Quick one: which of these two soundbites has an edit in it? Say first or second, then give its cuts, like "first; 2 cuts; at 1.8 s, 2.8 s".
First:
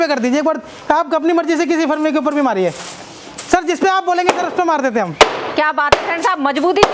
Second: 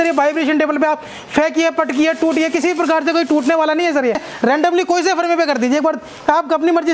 second; 1 cut; at 4.3 s